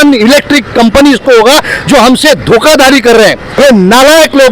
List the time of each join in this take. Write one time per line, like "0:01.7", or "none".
0:03.5